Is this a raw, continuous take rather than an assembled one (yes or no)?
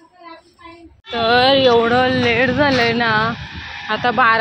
no